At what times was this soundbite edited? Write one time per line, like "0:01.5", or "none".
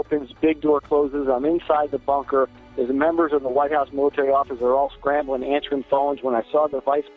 none